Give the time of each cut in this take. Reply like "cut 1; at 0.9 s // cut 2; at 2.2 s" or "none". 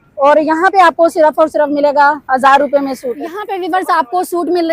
cut 1; at 3.4 s